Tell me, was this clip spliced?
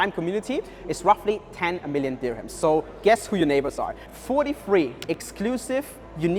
yes; 1 cut; at 3.9 s

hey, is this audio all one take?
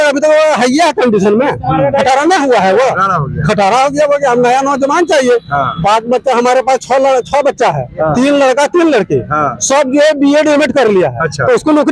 yes; 0 cuts

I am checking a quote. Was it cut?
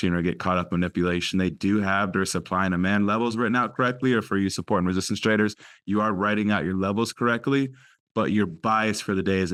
no; 0 cuts

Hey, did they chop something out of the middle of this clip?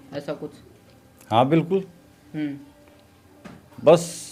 no; 0 cuts

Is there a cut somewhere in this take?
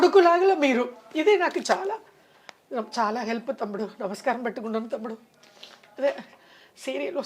no; 0 cuts

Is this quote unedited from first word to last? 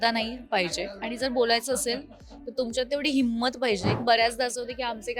no; 1 cut; at 4.0 s

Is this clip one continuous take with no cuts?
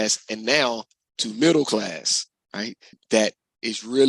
no; 1 cut; at 3.0 s

